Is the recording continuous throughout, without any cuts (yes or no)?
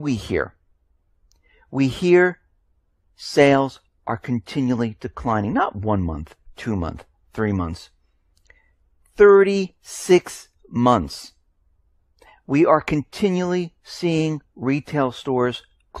yes